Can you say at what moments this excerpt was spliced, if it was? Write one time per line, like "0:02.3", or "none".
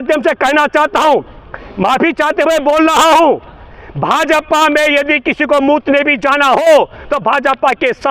none